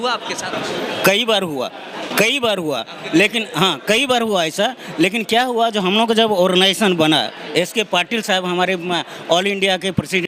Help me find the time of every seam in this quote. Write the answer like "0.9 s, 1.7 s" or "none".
none